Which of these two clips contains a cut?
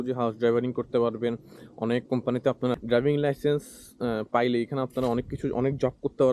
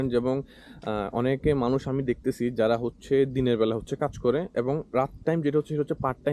first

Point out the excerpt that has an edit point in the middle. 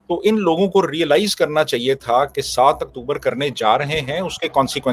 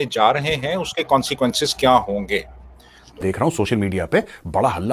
second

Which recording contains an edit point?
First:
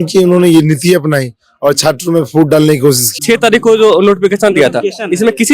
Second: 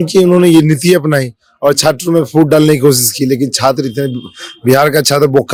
first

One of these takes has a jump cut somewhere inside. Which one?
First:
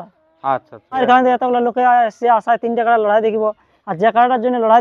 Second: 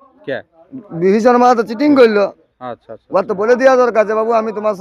first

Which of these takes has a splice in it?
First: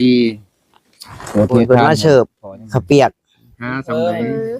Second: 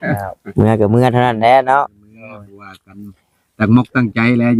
first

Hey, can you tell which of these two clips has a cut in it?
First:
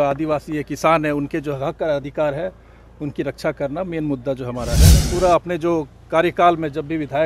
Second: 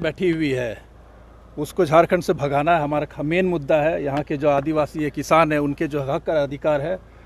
first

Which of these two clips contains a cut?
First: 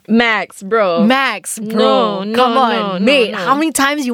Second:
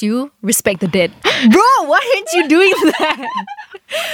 second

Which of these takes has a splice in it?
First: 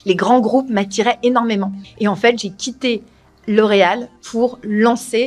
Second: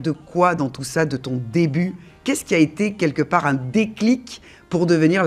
first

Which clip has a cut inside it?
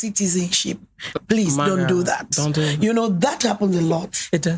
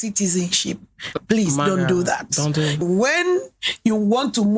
second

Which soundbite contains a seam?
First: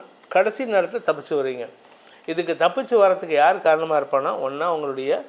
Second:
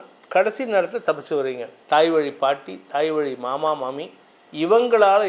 second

